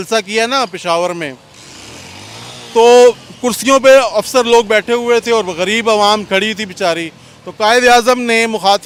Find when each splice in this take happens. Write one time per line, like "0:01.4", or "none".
none